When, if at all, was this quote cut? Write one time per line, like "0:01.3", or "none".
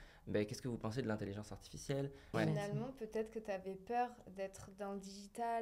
0:02.3